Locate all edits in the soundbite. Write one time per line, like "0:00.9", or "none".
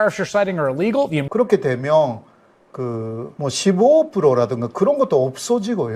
0:01.2
0:03.3